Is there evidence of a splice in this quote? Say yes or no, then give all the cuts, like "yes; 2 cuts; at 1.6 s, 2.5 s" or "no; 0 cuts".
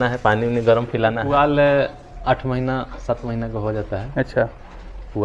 yes; 1 cut; at 1.2 s